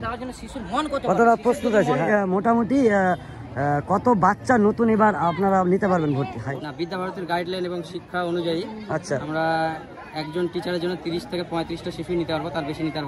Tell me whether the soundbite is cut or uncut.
cut